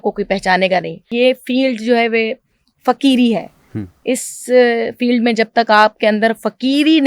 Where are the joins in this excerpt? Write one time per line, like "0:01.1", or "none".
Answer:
0:01.1